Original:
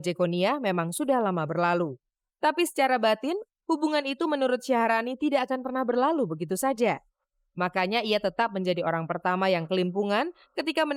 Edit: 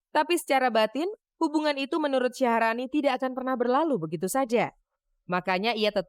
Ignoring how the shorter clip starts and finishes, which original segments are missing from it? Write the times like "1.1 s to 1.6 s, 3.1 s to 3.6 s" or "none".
none